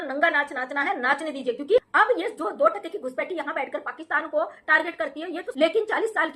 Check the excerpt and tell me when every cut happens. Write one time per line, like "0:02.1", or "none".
0:01.8
0:05.4